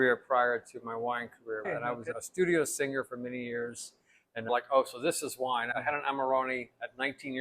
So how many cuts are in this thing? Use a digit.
3